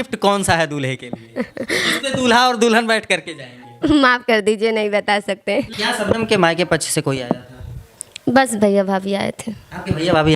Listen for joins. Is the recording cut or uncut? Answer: cut